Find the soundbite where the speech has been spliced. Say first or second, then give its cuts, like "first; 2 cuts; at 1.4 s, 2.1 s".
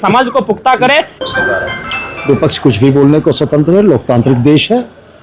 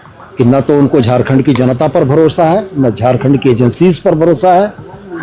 first; 1 cut; at 1.2 s